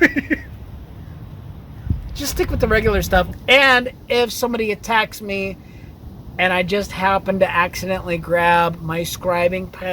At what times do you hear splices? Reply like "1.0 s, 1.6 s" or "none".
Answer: 3.3 s